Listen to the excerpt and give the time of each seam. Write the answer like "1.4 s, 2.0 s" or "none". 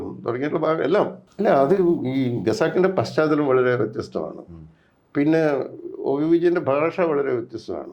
1.2 s